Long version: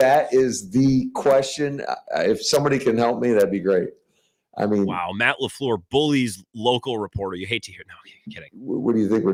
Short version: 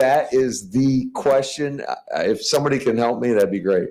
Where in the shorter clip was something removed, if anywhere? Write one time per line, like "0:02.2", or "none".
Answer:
none